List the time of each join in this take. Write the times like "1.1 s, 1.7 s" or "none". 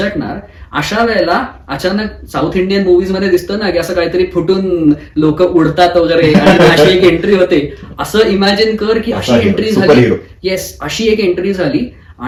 none